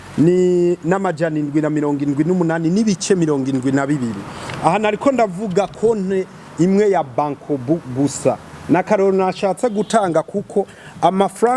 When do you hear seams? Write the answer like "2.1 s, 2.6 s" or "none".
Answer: none